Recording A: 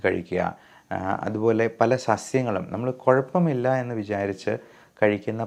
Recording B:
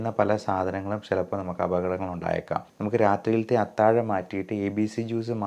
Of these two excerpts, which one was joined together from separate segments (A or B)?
B